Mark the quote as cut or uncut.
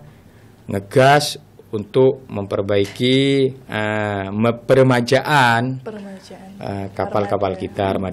uncut